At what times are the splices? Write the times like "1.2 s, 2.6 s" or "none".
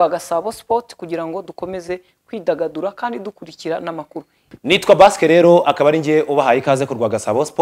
4.4 s